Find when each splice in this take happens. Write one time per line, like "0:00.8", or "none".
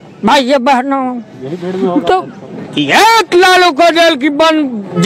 0:02.6